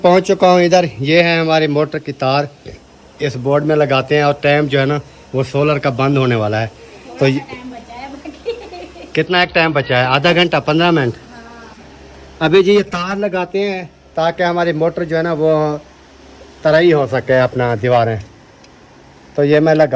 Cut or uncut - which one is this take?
uncut